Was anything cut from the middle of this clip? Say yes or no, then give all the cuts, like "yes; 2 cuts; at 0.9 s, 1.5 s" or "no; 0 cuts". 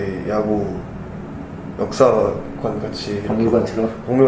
no; 0 cuts